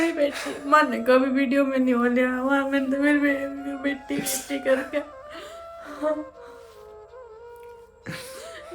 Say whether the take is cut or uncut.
uncut